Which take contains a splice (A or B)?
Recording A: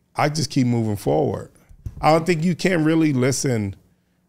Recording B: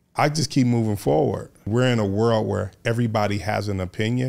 B